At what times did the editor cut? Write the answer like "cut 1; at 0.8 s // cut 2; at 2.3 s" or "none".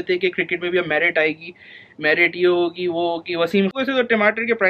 cut 1; at 3.7 s